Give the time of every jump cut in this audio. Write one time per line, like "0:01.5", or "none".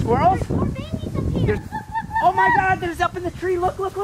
0:01.6